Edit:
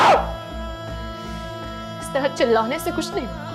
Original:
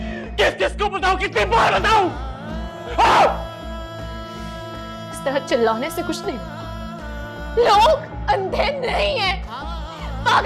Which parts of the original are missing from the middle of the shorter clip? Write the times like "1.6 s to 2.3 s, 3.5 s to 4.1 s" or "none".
none